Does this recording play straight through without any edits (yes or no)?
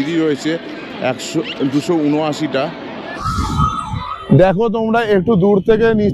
no